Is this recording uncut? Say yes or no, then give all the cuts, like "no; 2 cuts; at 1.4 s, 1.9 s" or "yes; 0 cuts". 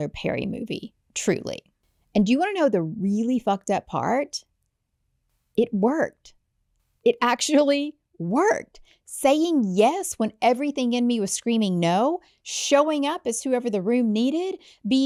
yes; 0 cuts